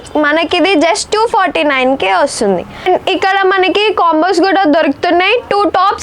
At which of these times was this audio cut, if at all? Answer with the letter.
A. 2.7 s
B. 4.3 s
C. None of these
A